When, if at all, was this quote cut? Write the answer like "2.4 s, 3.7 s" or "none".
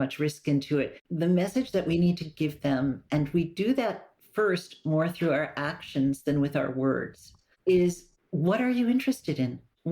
1.0 s